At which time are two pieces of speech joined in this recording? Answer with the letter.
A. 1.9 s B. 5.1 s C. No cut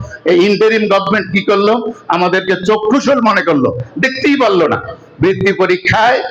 C